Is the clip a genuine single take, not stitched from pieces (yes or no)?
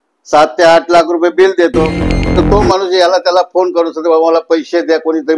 no